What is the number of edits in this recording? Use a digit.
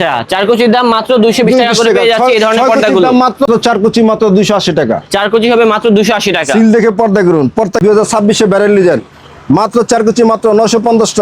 2